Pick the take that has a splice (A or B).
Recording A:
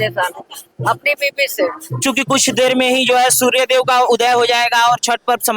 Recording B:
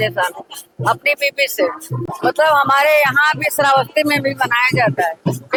A